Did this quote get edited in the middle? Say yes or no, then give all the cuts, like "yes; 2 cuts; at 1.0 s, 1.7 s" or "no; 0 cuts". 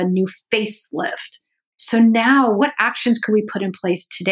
yes; 2 cuts; at 1.7 s, 2.6 s